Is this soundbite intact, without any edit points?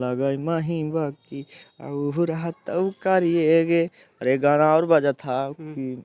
yes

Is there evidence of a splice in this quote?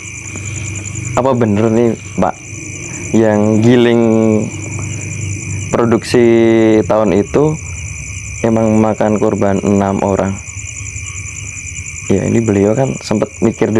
no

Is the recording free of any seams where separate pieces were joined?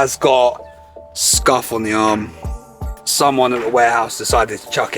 yes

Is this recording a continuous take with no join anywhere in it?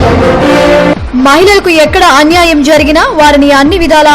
no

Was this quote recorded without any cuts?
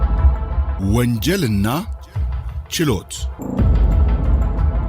no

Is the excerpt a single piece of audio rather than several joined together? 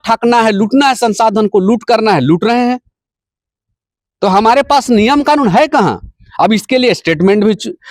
yes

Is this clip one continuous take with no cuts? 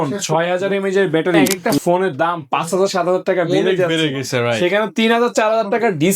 no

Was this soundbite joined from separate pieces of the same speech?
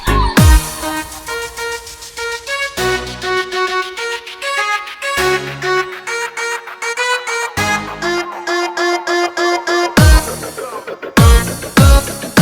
no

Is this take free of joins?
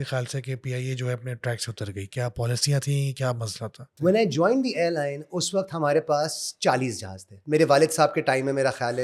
no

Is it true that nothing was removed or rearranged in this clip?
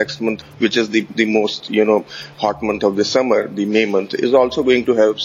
yes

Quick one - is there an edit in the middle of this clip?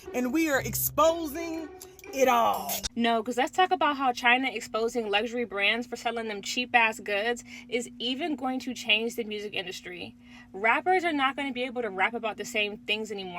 yes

